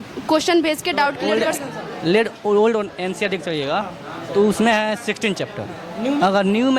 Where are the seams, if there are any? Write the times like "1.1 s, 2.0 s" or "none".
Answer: 1.3 s